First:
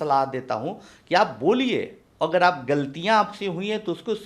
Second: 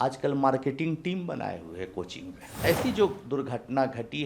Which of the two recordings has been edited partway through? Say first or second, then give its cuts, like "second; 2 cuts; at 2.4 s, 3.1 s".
second; 1 cut; at 2.4 s